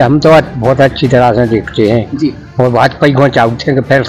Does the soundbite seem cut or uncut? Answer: uncut